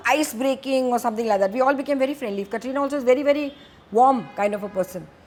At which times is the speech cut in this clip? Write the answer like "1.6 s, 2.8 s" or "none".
none

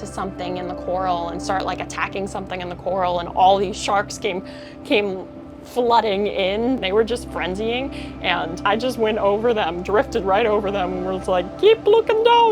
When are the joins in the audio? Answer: 6.8 s, 8.6 s

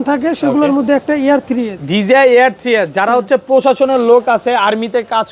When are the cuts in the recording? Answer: none

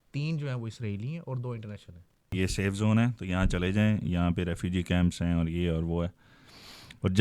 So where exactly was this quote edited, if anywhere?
2.3 s

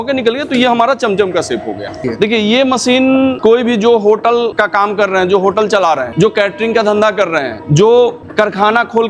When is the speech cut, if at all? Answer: 2.1 s, 3.4 s, 4.6 s, 6.1 s, 7.6 s, 8.2 s

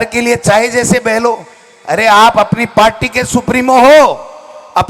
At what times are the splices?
none

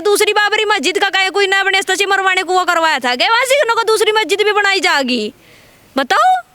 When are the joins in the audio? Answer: none

